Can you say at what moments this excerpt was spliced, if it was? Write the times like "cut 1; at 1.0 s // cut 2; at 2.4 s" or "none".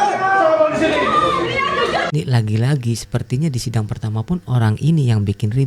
cut 1; at 2.1 s